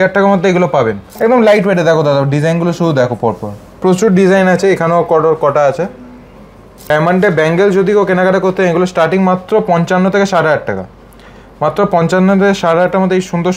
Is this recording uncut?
no; 2 cuts; at 1.0 s, 6.9 s

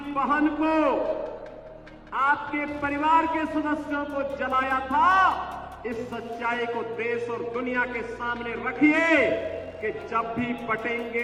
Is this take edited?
no; 0 cuts

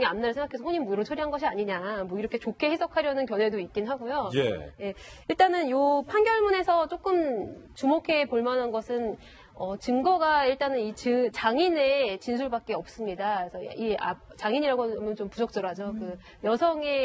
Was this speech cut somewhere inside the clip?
yes; 1 cut; at 3.2 s

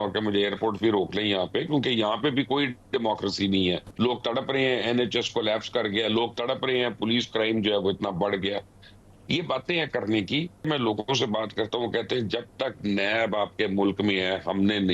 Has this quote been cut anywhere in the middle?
yes; 2 cuts; at 3.9 s, 10.6 s

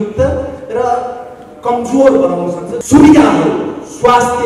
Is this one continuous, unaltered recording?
no; 1 cut; at 2.7 s

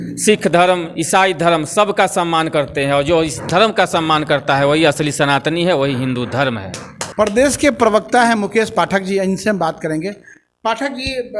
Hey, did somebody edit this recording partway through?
no; 0 cuts

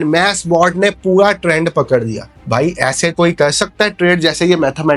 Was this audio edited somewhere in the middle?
no; 0 cuts

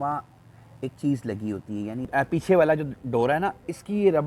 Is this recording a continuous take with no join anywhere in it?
no; 1 cut; at 2.0 s

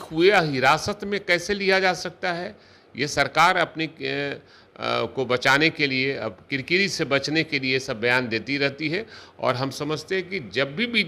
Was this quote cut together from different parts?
no; 0 cuts

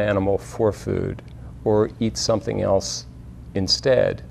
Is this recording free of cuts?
yes; 0 cuts

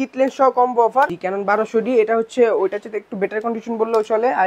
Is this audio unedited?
no; 1 cut; at 1.1 s

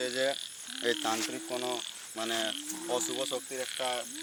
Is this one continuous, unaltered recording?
yes; 0 cuts

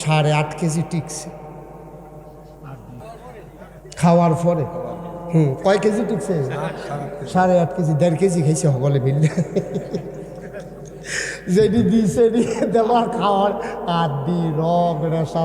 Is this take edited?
yes; 1 cut; at 3.0 s

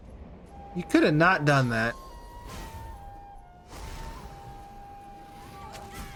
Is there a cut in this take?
no; 0 cuts

